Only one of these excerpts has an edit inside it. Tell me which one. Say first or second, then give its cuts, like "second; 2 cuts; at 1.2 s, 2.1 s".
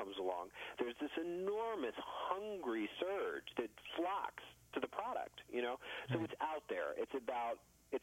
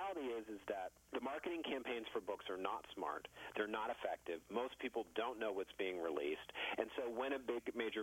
second; 1 cut; at 1.0 s